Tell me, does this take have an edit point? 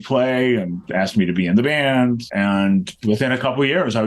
yes; 1 cut; at 2.2 s

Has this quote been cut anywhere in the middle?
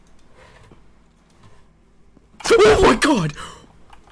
no; 0 cuts

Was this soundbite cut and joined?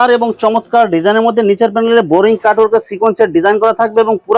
no; 0 cuts

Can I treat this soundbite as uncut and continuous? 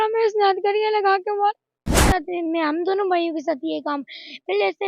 no; 1 cut; at 2.2 s

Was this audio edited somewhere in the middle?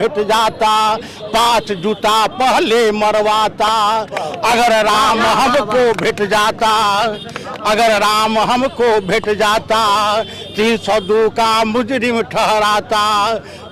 no; 0 cuts

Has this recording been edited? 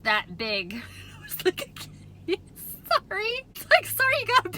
yes; 1 cut; at 3.6 s

